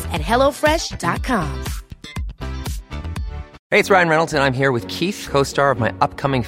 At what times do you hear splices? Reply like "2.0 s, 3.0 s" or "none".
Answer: 3.6 s